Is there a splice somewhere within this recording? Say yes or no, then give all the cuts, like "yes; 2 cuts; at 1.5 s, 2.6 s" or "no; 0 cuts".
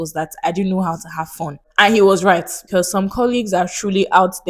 yes; 2 cuts; at 1.6 s, 2.6 s